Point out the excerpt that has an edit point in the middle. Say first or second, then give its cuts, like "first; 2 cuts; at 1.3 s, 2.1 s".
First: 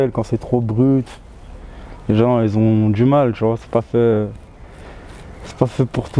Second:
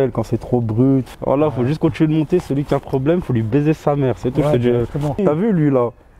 second; 2 cuts; at 1.2 s, 5.2 s